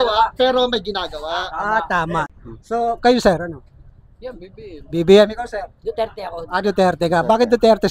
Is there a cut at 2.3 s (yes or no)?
yes